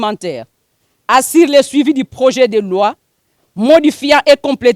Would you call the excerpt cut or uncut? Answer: uncut